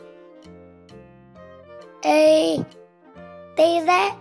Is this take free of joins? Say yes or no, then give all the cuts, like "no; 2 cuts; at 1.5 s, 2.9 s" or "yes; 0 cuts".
no; 1 cut; at 2.0 s